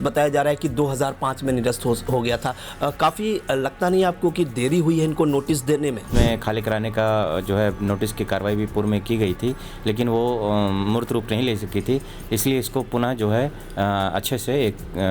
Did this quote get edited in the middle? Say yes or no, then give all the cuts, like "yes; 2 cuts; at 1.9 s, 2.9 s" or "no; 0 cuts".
yes; 1 cut; at 6.1 s